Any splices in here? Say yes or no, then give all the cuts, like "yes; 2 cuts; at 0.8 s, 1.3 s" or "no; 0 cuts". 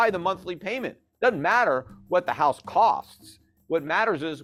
no; 0 cuts